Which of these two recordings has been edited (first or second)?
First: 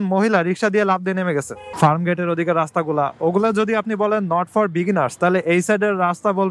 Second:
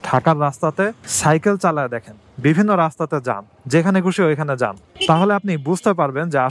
first